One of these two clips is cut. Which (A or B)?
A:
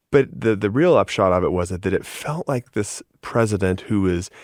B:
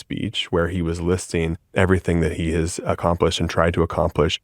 B